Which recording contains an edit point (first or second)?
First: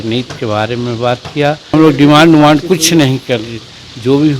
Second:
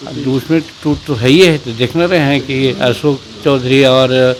first